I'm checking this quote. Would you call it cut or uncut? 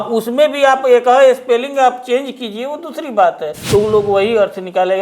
cut